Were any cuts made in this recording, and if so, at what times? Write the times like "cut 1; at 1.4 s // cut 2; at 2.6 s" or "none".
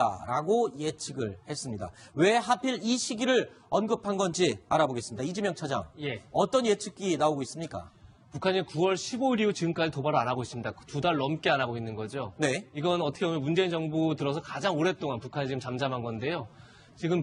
cut 1; at 1.5 s